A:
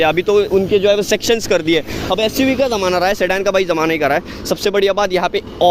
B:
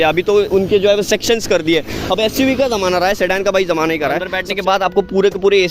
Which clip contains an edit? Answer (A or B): B